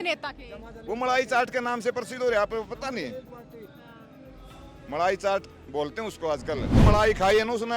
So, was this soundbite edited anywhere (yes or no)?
yes